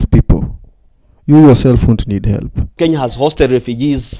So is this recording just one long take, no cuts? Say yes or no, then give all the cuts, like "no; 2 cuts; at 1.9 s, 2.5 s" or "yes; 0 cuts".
no; 1 cut; at 2.7 s